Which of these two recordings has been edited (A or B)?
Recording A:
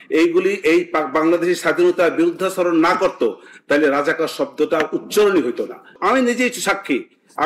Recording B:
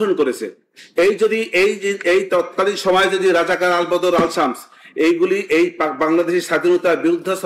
A